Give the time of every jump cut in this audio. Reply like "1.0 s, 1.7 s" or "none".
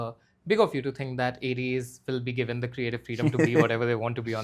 none